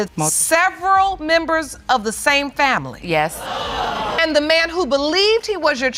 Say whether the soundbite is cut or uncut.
uncut